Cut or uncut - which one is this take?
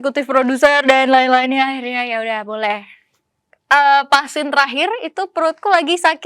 cut